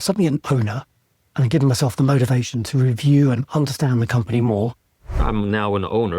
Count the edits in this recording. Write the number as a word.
one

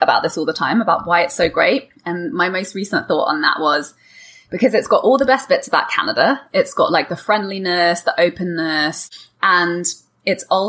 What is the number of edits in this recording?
one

